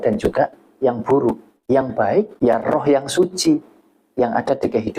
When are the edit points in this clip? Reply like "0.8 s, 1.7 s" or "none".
1.5 s, 2.3 s